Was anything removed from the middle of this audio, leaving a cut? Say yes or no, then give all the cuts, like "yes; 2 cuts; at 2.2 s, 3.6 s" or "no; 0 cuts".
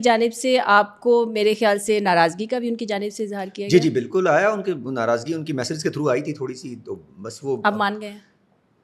no; 0 cuts